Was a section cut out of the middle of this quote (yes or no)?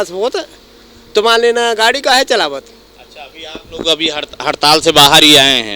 no